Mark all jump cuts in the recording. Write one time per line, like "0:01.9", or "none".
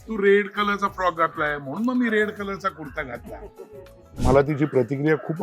0:04.1